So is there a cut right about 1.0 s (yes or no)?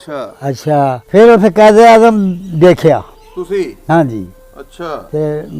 yes